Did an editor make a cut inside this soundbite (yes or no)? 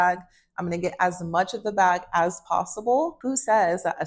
yes